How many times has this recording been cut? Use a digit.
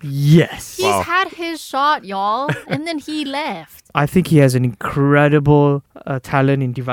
2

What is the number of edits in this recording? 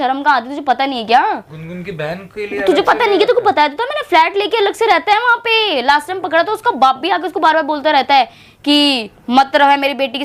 0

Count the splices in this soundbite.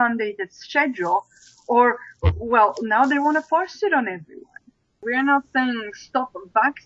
1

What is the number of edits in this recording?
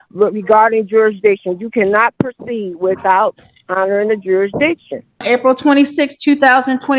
1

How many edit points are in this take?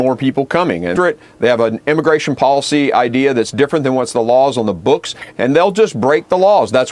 1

